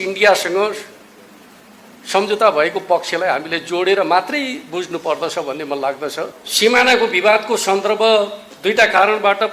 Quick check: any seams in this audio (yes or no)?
yes